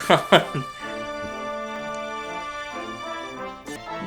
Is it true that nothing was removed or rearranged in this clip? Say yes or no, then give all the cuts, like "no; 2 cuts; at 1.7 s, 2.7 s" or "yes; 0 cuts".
yes; 0 cuts